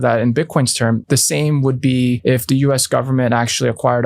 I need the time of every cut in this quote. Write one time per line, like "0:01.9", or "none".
0:01.0
0:02.2